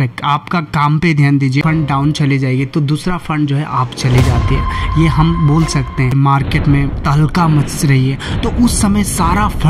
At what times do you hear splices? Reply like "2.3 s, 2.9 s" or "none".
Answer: 1.6 s, 6.1 s